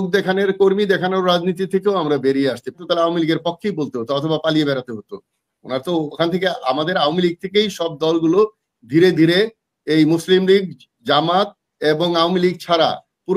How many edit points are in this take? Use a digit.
1